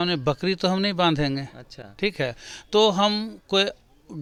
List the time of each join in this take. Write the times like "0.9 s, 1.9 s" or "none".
none